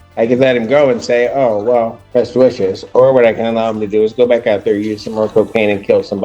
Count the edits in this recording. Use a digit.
1